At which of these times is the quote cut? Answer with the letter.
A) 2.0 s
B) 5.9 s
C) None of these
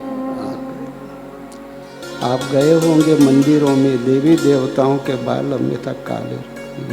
A